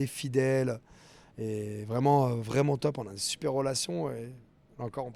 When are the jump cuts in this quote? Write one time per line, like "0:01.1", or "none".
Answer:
none